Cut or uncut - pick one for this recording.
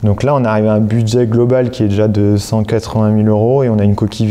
uncut